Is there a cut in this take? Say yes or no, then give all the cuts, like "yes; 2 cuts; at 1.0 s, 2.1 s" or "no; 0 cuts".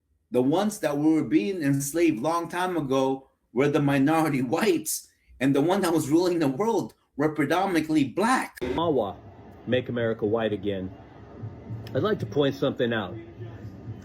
yes; 1 cut; at 8.8 s